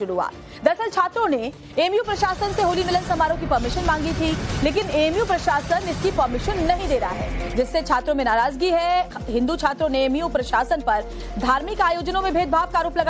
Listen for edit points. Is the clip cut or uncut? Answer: cut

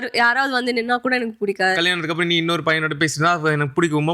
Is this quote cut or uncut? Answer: cut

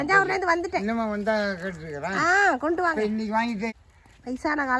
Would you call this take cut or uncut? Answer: cut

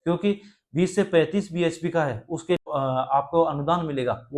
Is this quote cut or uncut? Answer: cut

